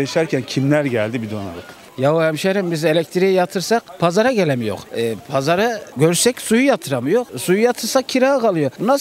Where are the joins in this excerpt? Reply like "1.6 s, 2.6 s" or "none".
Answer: 1.8 s